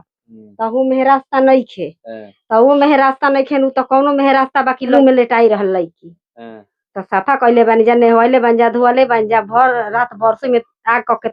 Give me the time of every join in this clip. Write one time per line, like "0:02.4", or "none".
0:04.9